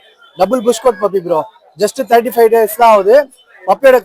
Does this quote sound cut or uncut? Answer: uncut